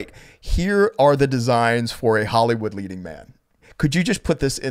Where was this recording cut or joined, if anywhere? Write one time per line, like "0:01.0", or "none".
none